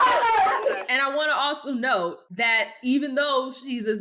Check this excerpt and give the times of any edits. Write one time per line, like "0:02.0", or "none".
0:00.8
0:02.3